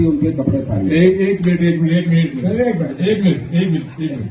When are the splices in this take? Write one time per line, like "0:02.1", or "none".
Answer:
none